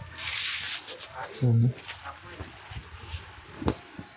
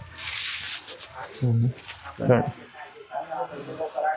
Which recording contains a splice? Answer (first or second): second